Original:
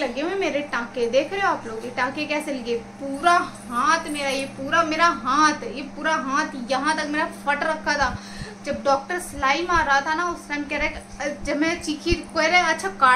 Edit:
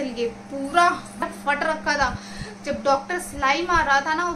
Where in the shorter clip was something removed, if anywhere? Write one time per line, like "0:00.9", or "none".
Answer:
0:01.2